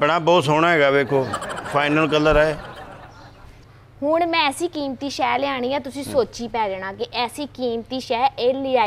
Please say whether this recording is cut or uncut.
cut